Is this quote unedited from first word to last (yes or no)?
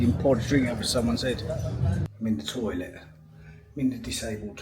no